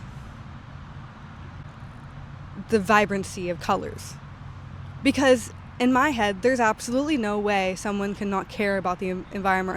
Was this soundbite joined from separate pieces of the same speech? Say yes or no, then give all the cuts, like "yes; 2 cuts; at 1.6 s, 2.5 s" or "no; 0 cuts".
no; 0 cuts